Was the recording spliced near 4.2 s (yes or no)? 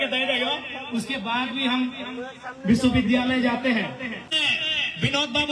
yes